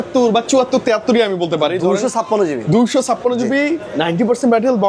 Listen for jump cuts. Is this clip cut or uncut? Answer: uncut